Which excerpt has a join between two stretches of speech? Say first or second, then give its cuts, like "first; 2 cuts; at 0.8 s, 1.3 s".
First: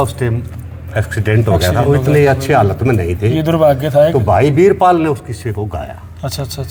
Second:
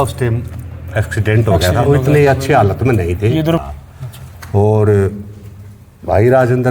second; 1 cut; at 3.6 s